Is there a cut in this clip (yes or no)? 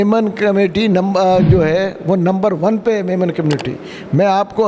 no